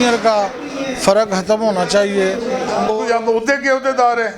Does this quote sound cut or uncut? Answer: cut